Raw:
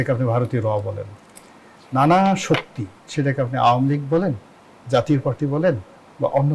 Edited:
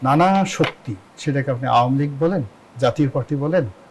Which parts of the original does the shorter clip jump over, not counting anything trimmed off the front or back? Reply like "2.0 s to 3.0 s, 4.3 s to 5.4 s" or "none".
4.5 s to 4.7 s